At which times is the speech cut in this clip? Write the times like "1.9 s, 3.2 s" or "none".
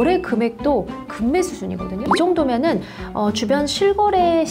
2.1 s